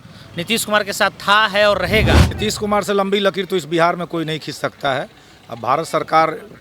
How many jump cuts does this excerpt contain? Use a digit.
1